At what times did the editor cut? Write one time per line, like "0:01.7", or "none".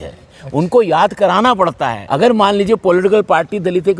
0:02.0